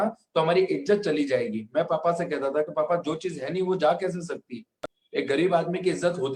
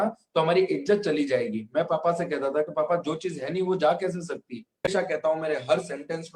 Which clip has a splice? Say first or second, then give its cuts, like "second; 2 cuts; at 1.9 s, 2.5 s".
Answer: second; 1 cut; at 4.9 s